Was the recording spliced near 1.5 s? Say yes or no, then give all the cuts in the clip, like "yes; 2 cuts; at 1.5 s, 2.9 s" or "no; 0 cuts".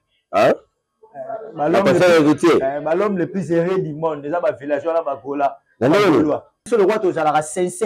no; 1 cut; at 6.7 s